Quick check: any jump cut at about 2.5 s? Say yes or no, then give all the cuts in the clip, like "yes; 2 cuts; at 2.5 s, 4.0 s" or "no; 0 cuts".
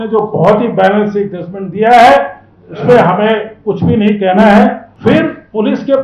no; 1 cut; at 4.9 s